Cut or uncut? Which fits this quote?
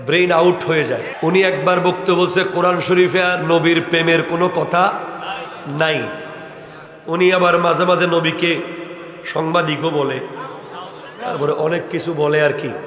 cut